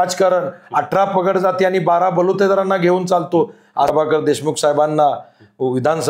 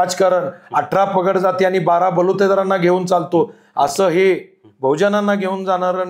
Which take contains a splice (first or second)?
first